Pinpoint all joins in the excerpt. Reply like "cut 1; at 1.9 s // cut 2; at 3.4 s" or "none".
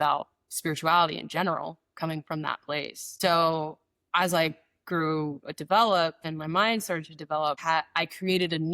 cut 1; at 3.0 s // cut 2; at 6.3 s // cut 3; at 7.6 s